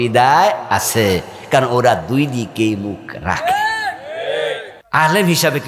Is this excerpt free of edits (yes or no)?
no